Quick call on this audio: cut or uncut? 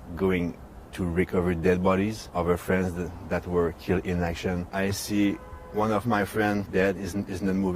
cut